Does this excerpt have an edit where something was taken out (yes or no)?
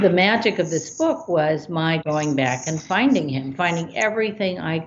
no